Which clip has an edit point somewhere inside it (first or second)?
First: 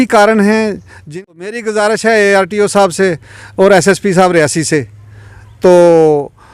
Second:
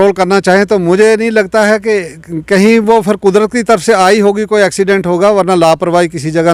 first